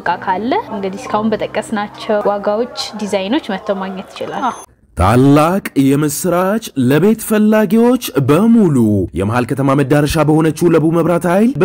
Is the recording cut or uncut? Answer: cut